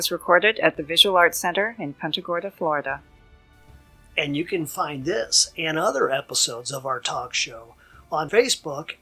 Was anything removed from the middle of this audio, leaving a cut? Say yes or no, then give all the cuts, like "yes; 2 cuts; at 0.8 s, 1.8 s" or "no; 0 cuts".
no; 0 cuts